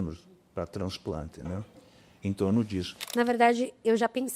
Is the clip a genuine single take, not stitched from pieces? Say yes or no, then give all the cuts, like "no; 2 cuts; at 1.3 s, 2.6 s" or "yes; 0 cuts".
no; 1 cut; at 3.0 s